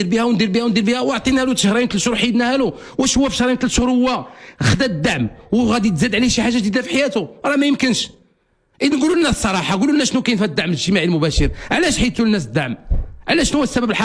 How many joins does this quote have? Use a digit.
0